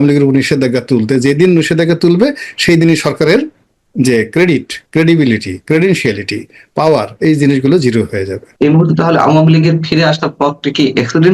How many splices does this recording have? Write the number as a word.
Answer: one